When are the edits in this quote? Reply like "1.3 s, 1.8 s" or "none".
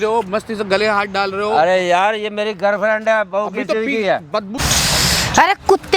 4.5 s